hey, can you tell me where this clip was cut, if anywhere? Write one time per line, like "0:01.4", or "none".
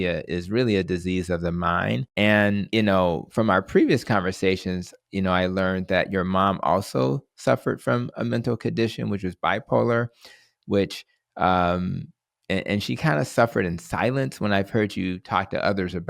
0:02.1
0:02.6